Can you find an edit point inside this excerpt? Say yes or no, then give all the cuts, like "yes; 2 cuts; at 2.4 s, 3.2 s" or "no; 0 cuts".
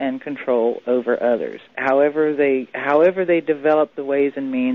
yes; 1 cut; at 3.3 s